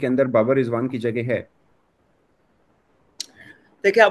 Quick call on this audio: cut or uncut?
uncut